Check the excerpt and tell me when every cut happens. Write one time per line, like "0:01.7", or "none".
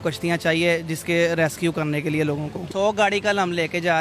0:02.6